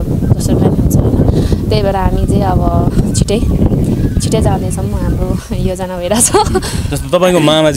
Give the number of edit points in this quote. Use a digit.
0